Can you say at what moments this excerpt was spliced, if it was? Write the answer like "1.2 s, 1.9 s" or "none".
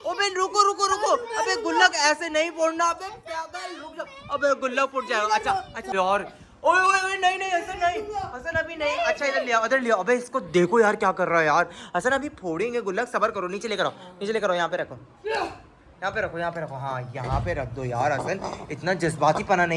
none